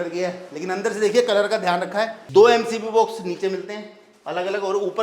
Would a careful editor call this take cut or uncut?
cut